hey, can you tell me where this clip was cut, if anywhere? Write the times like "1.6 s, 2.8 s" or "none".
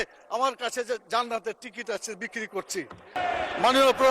3.2 s